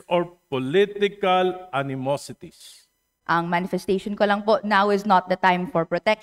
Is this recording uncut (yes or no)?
no